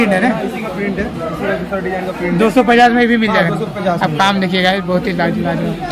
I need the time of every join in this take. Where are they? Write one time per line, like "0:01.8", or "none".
none

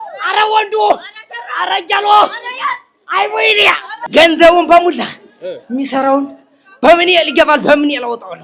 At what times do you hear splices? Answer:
0:03.9

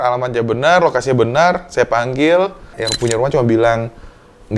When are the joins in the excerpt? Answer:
0:02.8

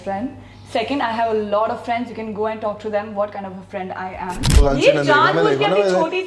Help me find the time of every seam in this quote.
0:04.6

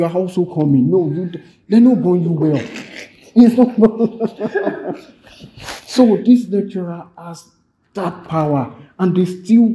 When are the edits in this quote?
none

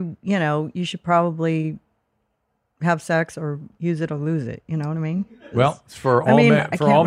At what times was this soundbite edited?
0:03.7
0:05.4

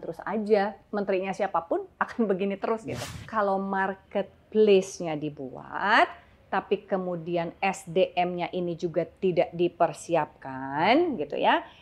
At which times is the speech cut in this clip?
0:03.2

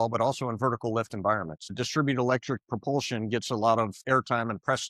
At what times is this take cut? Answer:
0:01.7
0:04.0

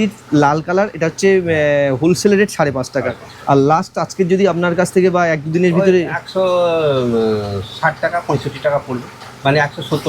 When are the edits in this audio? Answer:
none

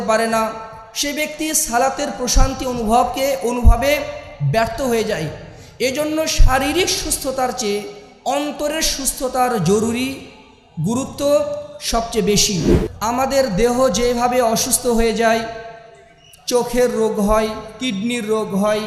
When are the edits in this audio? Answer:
0:12.7

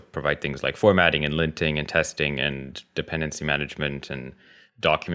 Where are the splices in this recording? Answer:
none

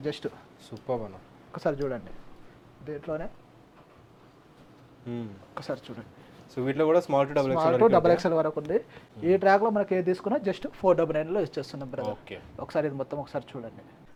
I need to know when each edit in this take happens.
none

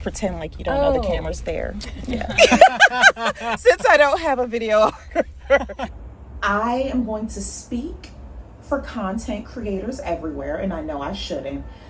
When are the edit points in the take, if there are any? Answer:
0:05.9

